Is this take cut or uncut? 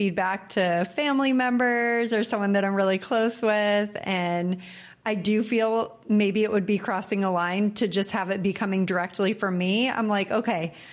uncut